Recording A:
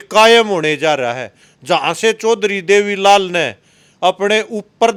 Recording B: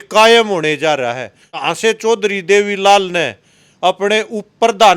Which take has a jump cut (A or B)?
B